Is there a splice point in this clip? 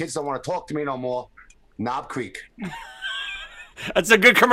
no; 0 cuts

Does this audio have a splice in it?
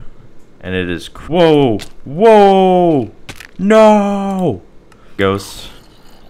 yes; 2 cuts; at 1.1 s, 5.2 s

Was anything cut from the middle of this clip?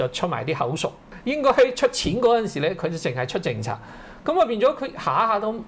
yes; 1 cut; at 1.1 s

